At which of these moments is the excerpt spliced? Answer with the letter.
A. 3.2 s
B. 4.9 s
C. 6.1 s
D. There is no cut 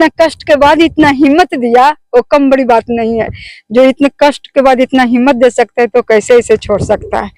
D